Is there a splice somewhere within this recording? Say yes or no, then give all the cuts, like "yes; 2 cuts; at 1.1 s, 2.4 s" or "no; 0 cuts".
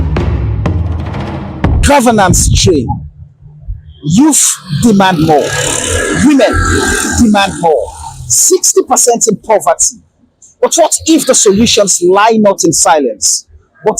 yes; 1 cut; at 1.8 s